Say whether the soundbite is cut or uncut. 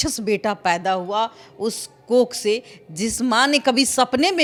uncut